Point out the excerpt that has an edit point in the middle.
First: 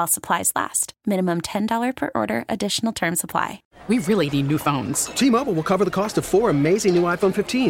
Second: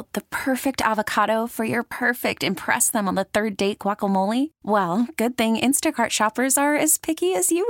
first; 1 cut; at 3.7 s

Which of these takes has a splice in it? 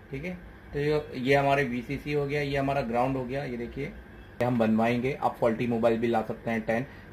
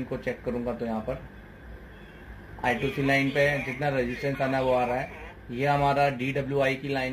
first; 1 cut; at 4.4 s

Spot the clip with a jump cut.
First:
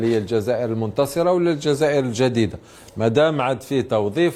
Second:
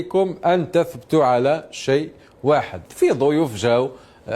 second; 1 cut; at 2.8 s

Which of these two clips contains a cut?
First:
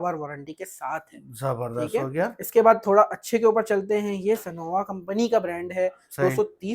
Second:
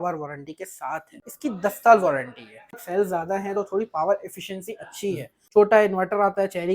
second; 3 cuts; at 1.3 s, 2.7 s, 5.3 s

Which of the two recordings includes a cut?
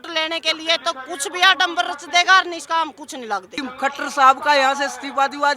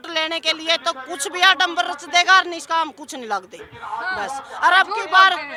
first; 1 cut; at 3.6 s

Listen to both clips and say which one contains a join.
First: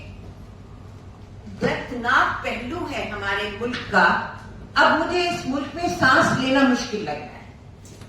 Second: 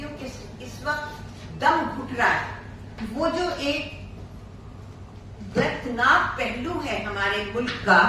second; 1 cut; at 2.9 s

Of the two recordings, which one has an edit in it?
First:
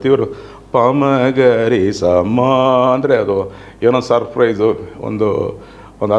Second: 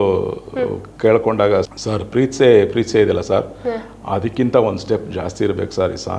second; 1 cut; at 1.7 s

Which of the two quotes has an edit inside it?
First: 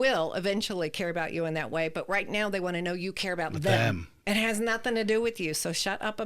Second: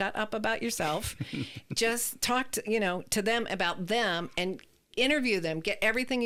first; 1 cut; at 4.1 s

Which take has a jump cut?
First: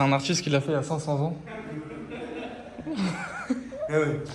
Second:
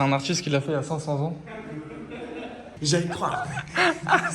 second; 1 cut; at 2.7 s

